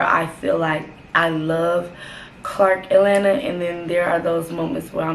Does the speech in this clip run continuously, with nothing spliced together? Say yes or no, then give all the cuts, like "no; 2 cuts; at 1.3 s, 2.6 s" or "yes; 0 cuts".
no; 1 cut; at 1.0 s